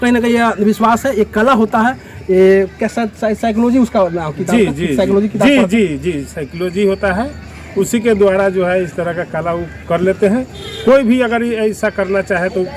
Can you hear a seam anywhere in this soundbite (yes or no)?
no